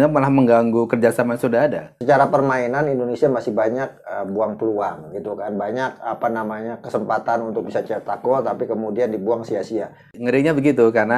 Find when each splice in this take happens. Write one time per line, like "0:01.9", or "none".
0:01.9
0:10.2